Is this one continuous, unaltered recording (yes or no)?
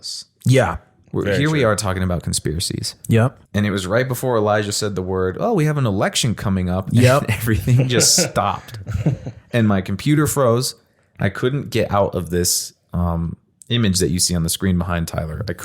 no